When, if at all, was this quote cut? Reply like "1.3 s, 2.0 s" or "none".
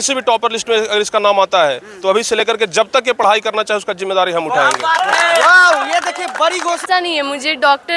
6.8 s